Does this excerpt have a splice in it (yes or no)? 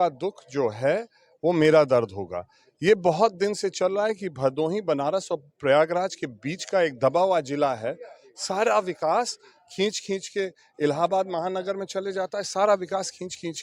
no